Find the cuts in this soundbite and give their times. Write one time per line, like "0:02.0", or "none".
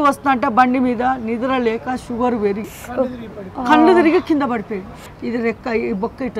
0:02.8
0:05.2

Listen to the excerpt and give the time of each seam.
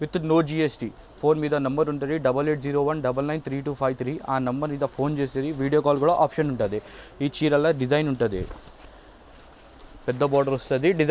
none

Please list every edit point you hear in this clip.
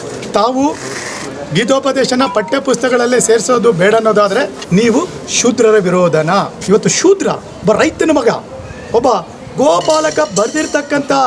0:04.6
0:06.6

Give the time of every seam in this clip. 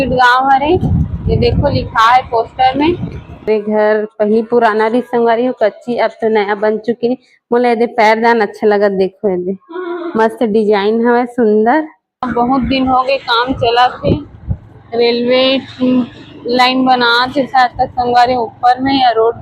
0:03.5
0:12.3

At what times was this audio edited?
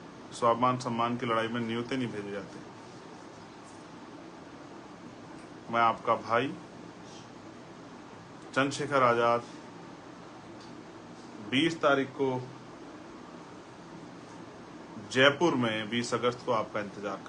none

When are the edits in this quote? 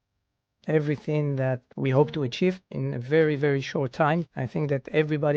0:01.7
0:02.7
0:04.4

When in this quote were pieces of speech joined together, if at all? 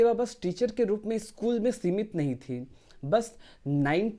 none

